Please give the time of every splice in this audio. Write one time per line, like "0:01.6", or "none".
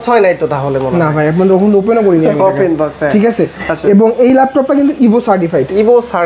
none